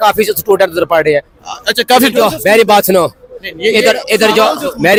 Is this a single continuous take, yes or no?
yes